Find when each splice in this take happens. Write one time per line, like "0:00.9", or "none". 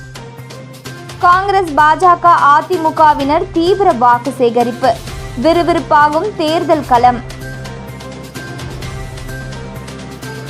0:01.0